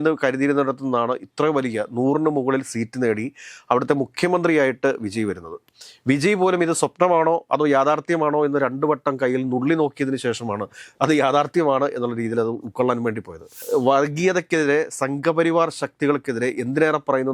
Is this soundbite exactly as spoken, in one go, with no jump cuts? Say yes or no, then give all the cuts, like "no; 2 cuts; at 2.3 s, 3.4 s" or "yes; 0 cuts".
no; 1 cut; at 13.6 s